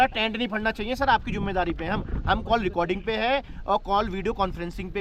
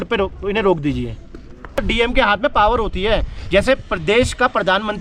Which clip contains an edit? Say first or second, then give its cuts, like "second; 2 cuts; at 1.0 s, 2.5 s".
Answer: second; 1 cut; at 1.8 s